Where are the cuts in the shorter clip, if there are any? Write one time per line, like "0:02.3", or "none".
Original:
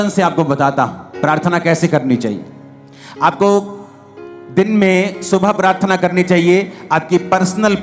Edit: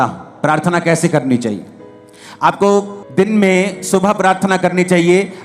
0:03.0